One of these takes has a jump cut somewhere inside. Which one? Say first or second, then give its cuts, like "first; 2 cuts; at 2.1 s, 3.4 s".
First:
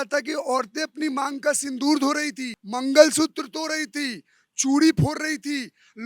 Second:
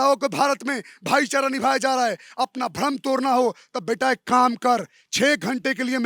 first; 1 cut; at 2.6 s